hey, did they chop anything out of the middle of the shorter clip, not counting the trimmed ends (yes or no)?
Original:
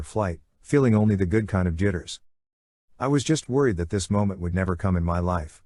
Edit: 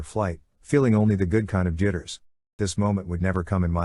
yes